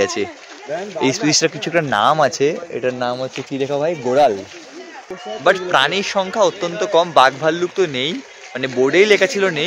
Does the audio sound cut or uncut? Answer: cut